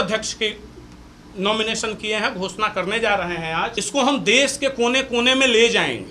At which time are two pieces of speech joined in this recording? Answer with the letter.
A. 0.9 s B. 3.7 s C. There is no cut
B